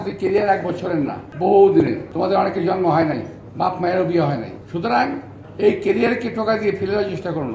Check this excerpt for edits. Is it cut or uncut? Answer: cut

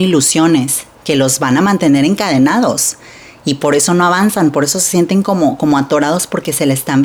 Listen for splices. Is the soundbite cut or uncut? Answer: uncut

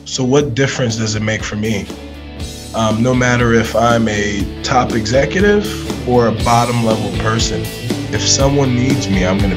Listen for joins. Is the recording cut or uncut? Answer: uncut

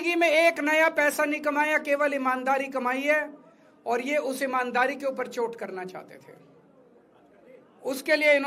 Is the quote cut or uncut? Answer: uncut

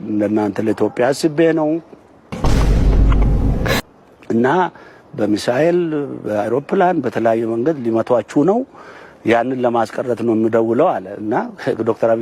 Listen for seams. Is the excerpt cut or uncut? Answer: uncut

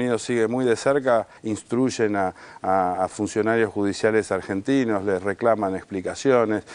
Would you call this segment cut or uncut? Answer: cut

